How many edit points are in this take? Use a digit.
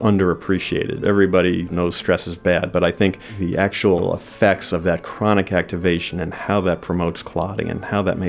4